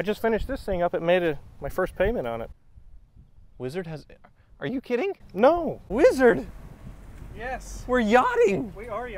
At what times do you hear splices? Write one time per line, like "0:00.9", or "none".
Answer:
0:05.8